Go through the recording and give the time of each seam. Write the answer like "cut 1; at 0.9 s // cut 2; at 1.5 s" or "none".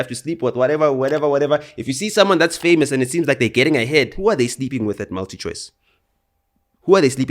cut 1; at 4.1 s